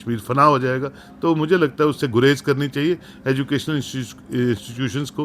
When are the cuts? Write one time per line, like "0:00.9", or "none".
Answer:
none